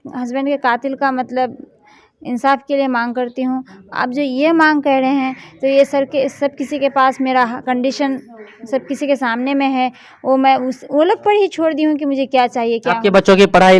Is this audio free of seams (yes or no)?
yes